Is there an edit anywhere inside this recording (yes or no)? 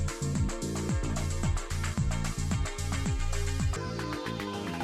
yes